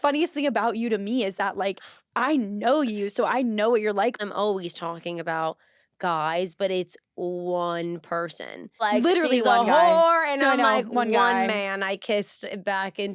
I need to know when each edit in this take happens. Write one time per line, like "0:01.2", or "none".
0:04.2
0:08.8